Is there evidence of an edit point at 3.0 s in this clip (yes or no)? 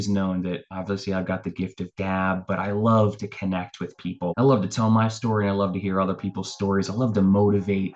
no